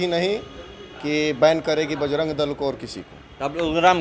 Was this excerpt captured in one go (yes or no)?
yes